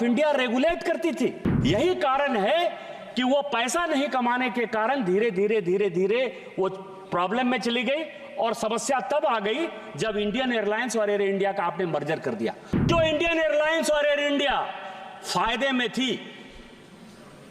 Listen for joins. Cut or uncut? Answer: cut